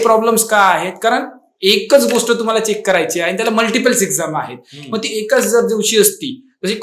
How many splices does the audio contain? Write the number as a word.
zero